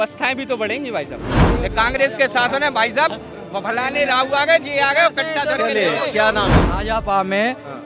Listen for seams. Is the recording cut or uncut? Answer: cut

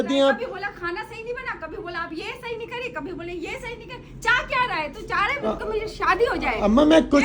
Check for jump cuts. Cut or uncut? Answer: uncut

